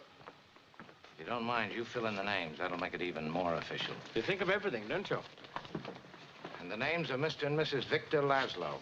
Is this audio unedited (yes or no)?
no